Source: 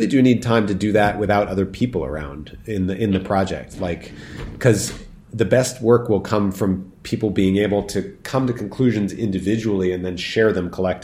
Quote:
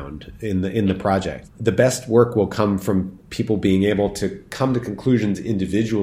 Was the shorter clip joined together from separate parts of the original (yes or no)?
yes